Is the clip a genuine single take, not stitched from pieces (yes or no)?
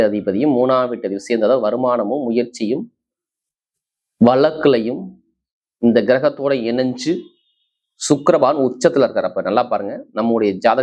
yes